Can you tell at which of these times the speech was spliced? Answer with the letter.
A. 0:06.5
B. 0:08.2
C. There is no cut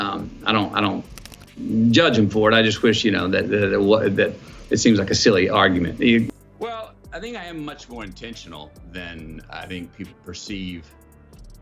C